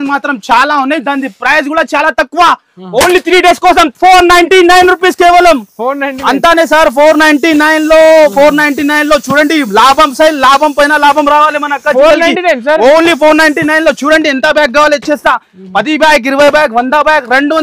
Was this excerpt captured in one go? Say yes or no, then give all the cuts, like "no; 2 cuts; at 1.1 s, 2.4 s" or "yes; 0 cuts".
yes; 0 cuts